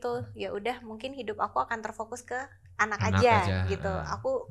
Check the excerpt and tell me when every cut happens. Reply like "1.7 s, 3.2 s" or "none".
none